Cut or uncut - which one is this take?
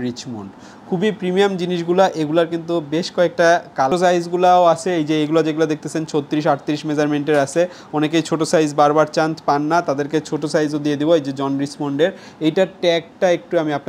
cut